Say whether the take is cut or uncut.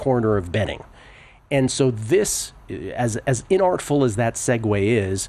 uncut